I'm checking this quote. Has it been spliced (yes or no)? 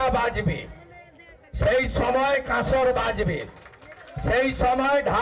no